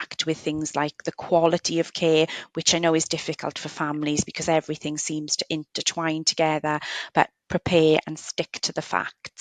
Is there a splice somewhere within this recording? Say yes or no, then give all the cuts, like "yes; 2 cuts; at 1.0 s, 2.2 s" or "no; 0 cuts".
no; 0 cuts